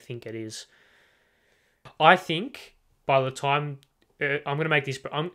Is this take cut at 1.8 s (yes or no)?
yes